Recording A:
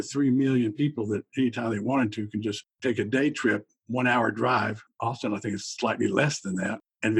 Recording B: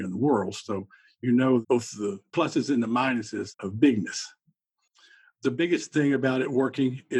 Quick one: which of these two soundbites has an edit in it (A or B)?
A